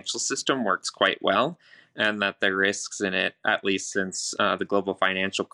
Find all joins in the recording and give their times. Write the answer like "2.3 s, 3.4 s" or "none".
none